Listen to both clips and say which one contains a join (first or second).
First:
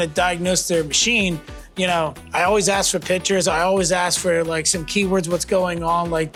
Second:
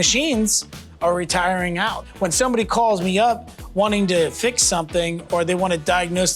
second